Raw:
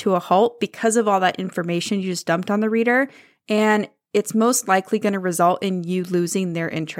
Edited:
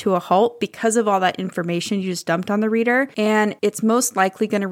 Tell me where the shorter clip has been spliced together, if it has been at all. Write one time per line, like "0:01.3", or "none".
0:03.4